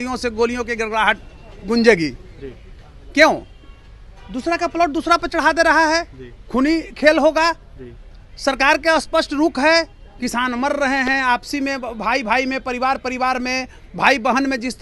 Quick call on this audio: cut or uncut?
uncut